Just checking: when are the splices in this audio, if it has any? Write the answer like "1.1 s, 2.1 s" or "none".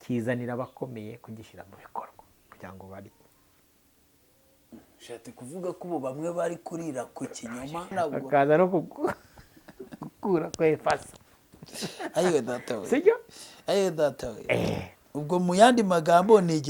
7.9 s